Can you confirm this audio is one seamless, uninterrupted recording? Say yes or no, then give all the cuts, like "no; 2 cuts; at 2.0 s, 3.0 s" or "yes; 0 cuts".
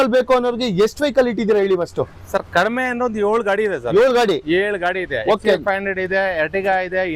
yes; 0 cuts